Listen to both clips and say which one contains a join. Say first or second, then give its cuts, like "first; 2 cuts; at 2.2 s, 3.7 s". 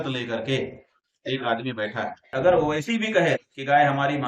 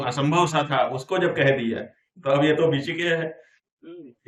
first; 1 cut; at 2.3 s